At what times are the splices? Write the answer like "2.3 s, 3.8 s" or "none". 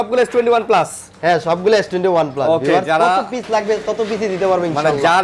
none